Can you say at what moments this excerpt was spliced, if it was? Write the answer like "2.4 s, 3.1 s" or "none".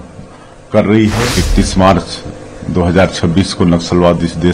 1.3 s